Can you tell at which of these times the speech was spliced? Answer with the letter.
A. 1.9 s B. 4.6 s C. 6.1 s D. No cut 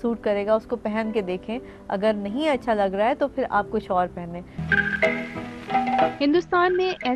B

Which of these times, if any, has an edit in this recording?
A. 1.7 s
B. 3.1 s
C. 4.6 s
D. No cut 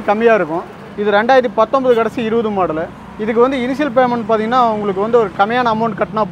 D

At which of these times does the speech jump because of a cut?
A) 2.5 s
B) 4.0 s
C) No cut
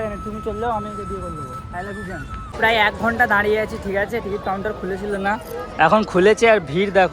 A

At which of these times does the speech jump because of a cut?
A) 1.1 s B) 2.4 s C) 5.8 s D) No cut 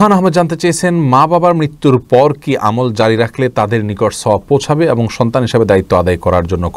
D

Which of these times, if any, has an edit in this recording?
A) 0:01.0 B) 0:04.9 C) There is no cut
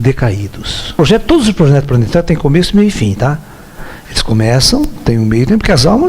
A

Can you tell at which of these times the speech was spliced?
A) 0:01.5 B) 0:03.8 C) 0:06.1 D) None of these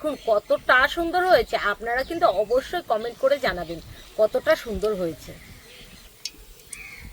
C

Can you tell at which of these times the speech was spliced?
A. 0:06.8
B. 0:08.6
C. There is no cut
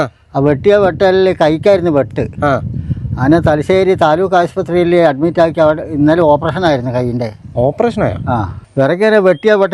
B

